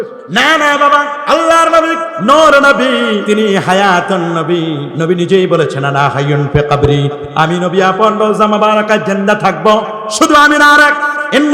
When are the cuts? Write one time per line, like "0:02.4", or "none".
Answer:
0:01.2
0:02.1
0:03.2
0:04.9